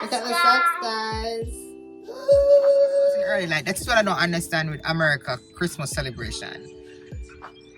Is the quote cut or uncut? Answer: cut